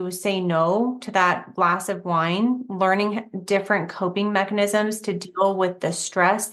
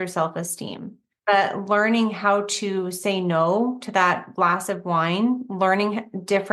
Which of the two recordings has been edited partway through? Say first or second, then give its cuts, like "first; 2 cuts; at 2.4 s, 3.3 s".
second; 1 cut; at 1.1 s